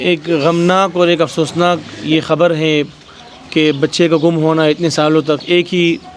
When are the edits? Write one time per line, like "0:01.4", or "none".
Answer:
none